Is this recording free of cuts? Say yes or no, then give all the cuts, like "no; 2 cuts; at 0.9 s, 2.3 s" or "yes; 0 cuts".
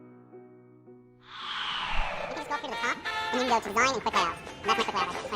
no; 2 cuts; at 1.2 s, 2.3 s